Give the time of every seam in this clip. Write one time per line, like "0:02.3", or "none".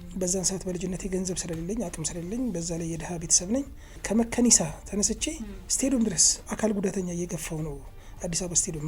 0:03.9
0:06.5